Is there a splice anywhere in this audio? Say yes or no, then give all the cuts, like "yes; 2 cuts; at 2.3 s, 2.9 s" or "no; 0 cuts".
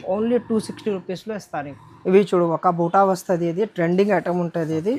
no; 0 cuts